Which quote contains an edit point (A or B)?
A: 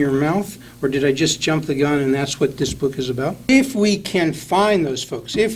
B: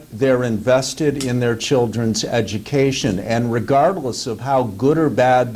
A